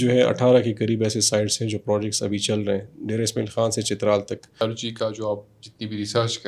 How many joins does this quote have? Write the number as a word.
one